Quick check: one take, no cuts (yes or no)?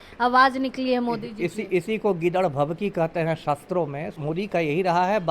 no